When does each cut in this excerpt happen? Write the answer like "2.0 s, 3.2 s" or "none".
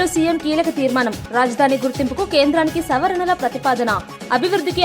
none